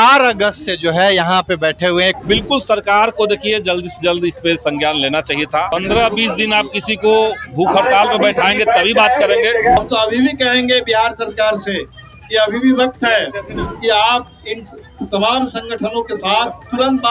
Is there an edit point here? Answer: yes; 2 cuts; at 2.2 s, 9.8 s

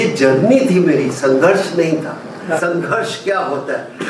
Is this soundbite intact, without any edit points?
no; 1 cut; at 2.6 s

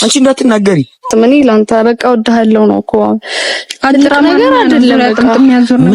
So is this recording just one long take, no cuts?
no; 1 cut; at 1.1 s

